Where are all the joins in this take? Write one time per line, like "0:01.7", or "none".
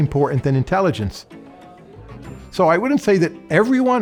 none